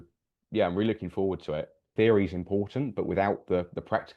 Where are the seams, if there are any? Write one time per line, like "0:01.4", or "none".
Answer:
0:01.9

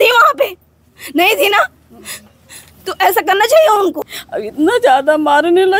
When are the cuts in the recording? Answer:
0:04.1

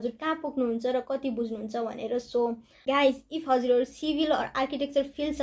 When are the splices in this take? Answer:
0:02.7

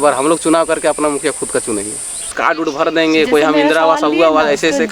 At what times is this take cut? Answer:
0:02.3

